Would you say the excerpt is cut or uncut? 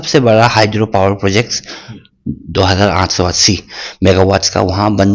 uncut